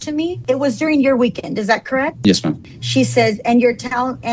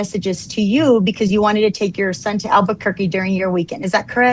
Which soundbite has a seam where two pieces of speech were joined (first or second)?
first